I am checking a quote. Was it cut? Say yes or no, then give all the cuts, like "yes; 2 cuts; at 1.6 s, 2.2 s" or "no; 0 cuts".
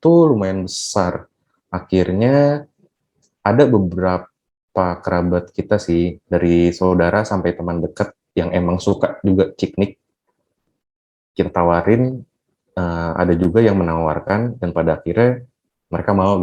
no; 0 cuts